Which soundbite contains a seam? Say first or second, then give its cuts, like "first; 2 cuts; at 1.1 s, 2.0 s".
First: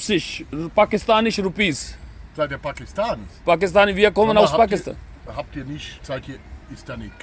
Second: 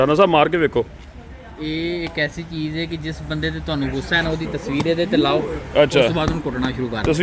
first; 1 cut; at 1.0 s